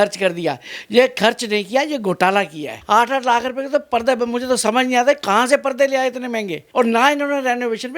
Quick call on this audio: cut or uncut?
cut